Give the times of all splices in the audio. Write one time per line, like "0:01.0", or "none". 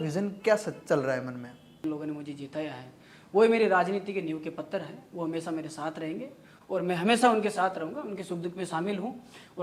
0:01.8